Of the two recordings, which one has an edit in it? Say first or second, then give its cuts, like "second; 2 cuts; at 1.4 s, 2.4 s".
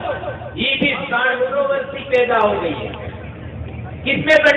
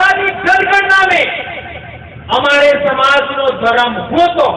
first; 1 cut; at 1.3 s